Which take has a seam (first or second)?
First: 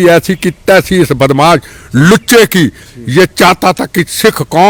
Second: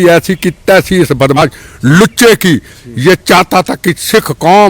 second